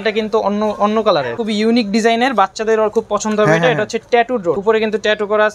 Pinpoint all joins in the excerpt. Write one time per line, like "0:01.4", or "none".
0:01.4
0:04.6